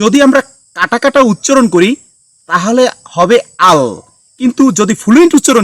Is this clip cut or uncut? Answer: uncut